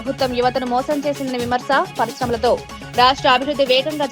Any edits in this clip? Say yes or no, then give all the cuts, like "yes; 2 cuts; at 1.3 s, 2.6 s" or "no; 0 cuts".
no; 0 cuts